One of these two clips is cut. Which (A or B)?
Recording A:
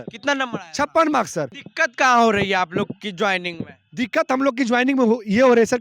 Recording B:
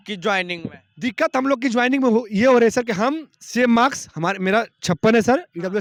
A